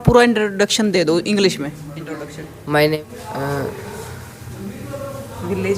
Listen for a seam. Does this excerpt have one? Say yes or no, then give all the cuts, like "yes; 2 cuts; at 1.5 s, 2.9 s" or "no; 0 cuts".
yes; 1 cut; at 3.0 s